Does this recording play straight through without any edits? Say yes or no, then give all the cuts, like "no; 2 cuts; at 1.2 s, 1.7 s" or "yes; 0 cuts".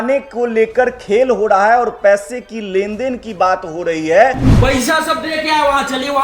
no; 1 cut; at 4.5 s